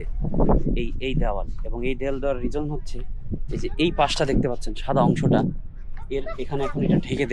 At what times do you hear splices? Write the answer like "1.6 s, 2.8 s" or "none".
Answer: none